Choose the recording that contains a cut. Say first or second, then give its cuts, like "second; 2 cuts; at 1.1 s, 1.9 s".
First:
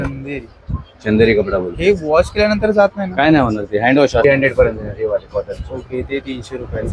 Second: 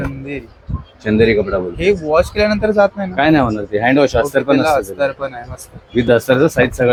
first; 1 cut; at 4.2 s